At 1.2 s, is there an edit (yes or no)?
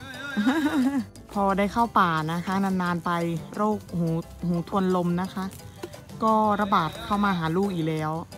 yes